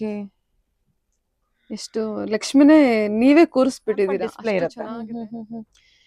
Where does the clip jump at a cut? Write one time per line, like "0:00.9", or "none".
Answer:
0:04.4